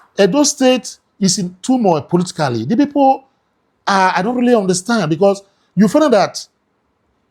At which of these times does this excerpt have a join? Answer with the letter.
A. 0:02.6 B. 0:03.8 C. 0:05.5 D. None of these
D